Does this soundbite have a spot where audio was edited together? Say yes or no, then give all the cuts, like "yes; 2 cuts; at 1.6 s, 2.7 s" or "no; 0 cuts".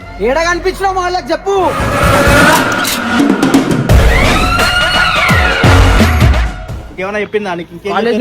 yes; 1 cut; at 6.7 s